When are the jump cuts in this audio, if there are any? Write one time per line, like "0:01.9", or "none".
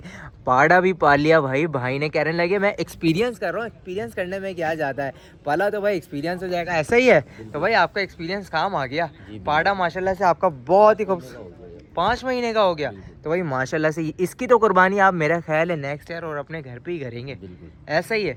none